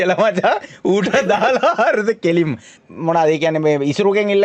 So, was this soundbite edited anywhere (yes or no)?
yes